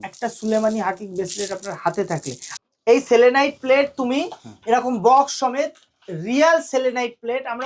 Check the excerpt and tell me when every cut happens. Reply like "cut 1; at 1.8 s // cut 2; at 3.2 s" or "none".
cut 1; at 2.4 s